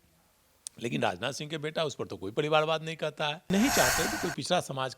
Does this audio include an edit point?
yes; 1 cut; at 3.5 s

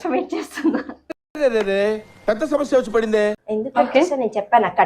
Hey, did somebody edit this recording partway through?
yes; 1 cut; at 3.4 s

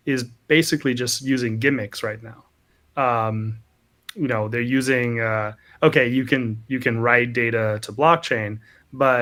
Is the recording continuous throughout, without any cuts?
yes; 0 cuts

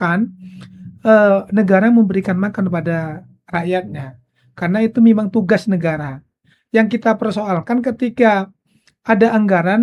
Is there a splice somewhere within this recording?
no; 0 cuts

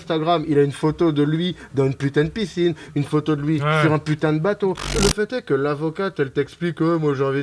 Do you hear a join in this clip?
yes; 1 cut; at 4.9 s

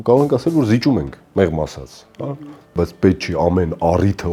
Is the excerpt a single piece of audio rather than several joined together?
no; 1 cut; at 2.7 s

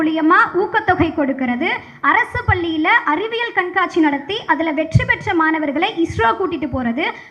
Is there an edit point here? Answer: no; 0 cuts

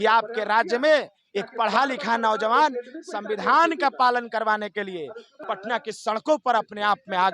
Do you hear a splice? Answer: yes; 1 cut; at 5.3 s

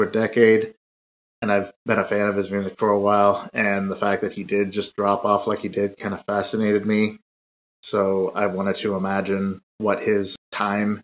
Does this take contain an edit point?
yes; 1 cut; at 9.9 s

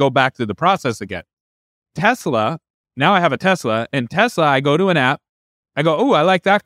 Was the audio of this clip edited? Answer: no; 0 cuts

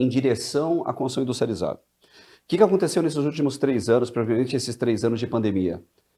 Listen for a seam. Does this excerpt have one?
no; 0 cuts

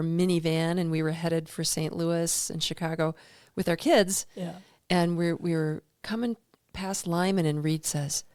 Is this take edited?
no; 0 cuts

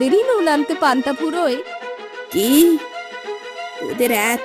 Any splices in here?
no; 0 cuts

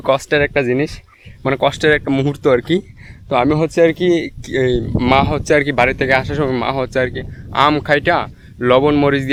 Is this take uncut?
yes; 0 cuts

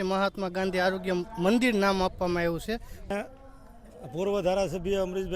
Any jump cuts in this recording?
yes; 1 cut; at 3.1 s

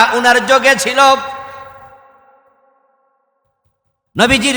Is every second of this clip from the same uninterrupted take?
yes; 0 cuts

